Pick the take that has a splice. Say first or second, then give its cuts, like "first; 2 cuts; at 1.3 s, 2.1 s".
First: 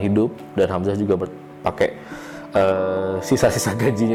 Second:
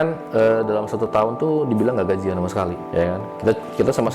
second; 1 cut; at 2.8 s